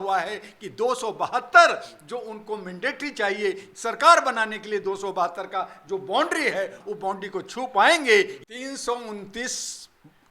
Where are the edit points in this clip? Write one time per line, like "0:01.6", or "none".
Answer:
0:03.7
0:06.8
0:08.4